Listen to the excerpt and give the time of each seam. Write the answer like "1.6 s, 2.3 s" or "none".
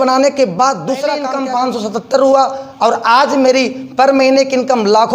1.3 s